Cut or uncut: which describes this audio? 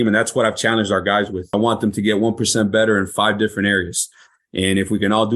cut